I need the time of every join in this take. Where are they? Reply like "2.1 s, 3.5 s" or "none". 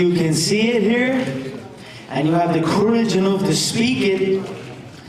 none